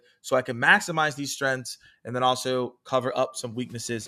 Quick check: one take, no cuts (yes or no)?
yes